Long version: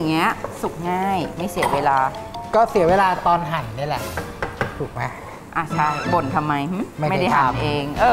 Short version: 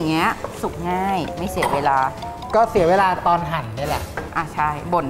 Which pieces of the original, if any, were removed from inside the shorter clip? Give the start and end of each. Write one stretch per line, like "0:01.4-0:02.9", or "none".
0:04.2-0:05.4